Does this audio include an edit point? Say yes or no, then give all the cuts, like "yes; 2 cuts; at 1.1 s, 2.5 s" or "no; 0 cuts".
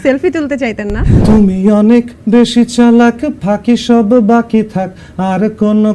yes; 1 cut; at 1.1 s